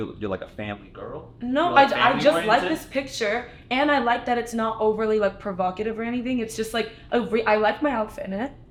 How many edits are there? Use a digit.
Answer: 0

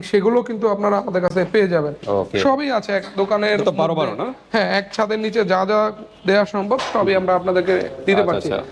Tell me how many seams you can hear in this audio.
0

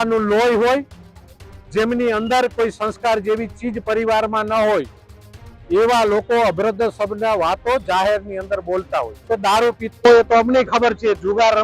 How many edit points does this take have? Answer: 1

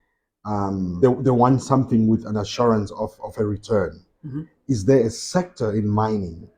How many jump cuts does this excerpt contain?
1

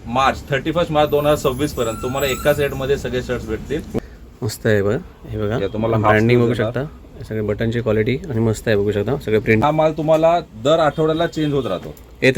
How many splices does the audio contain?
2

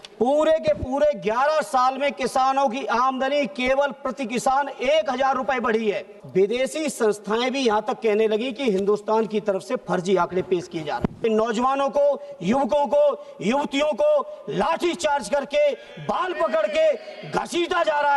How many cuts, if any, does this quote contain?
2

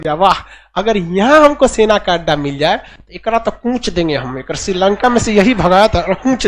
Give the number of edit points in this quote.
0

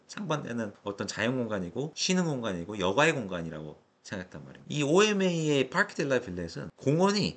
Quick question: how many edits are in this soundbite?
1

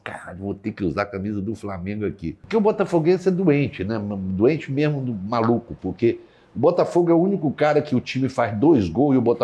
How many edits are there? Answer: 1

